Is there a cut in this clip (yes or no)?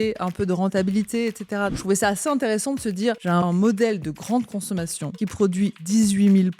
yes